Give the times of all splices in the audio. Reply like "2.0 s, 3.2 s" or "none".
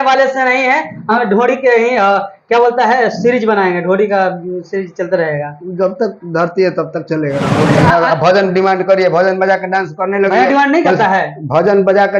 7.5 s